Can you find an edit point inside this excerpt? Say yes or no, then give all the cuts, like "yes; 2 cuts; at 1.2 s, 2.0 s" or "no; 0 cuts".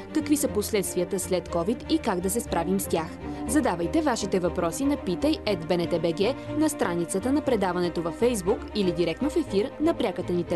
no; 0 cuts